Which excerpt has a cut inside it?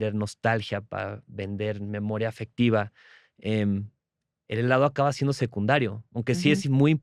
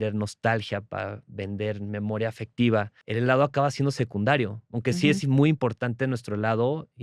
second; 1 cut; at 3.0 s

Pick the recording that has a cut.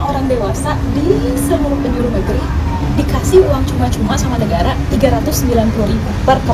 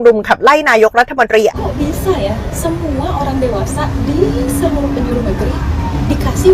second; 1 cut; at 1.5 s

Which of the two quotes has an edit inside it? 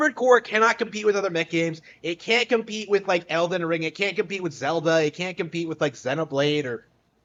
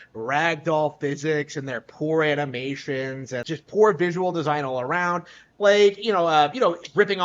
second; 1 cut; at 3.4 s

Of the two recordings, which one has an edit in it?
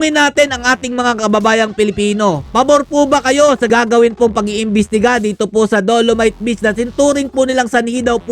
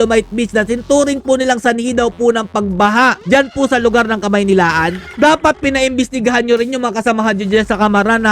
second; 1 cut; at 5.0 s

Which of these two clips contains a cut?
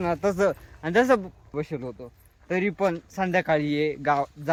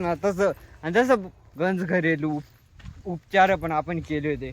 second; 1 cut; at 1.4 s

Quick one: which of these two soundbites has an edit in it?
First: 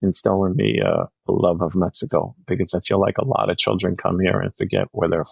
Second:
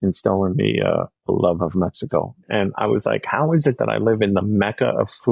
second; 1 cut; at 2.4 s

